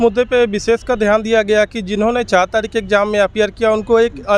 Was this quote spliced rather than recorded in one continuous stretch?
no; 0 cuts

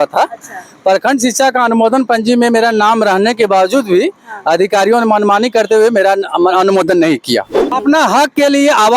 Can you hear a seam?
yes; 1 cut; at 7.8 s

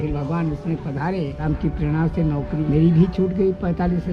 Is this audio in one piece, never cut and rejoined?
no; 2 cuts; at 1.4 s, 2.7 s

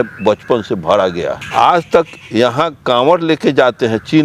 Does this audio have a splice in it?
yes; 1 cut; at 1.4 s

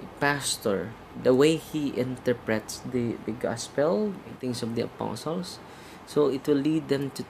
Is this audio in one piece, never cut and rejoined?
no; 2 cuts; at 1.0 s, 4.4 s

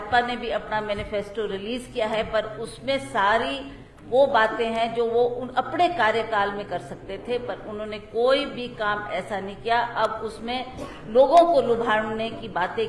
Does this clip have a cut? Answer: no; 0 cuts

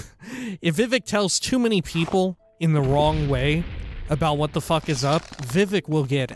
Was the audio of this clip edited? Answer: yes; 1 cut; at 5.4 s

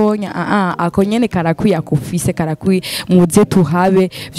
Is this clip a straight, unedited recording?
yes; 0 cuts

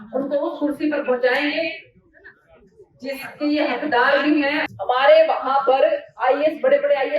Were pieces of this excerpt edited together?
yes; 1 cut; at 4.6 s

